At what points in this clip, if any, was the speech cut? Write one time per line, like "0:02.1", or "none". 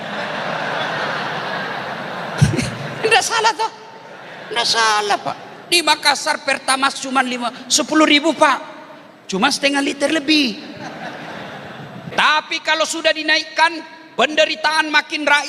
0:12.0